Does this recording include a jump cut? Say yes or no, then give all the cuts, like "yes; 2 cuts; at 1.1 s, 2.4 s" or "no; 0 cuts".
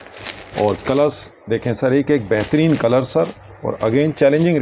no; 0 cuts